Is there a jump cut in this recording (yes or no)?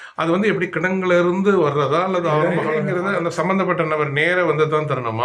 yes